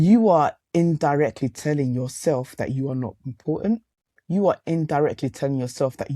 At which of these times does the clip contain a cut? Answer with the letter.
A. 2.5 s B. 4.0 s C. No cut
B